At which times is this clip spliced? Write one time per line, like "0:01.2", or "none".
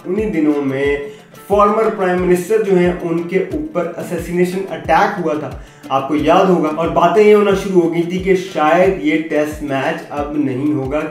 none